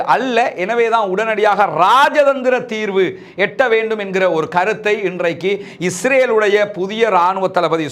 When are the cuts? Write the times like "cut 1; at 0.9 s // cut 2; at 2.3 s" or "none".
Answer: none

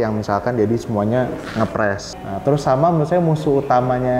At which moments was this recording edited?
cut 1; at 2.1 s

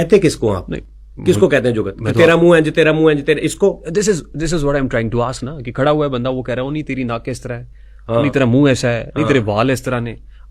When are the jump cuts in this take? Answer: none

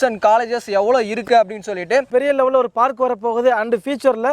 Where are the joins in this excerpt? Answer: cut 1; at 2.1 s

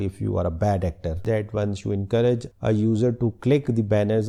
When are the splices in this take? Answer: none

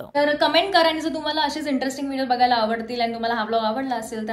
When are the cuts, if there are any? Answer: none

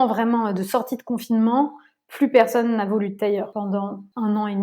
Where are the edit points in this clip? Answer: cut 1; at 3.7 s

